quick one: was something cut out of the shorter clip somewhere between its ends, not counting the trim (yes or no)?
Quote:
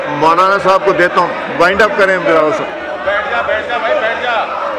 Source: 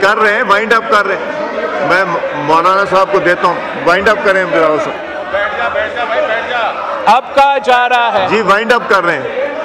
no